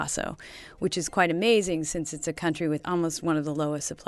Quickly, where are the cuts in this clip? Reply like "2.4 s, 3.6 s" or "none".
2.8 s